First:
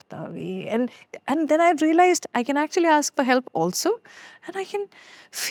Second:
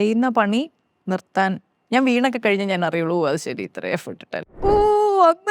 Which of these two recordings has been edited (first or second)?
second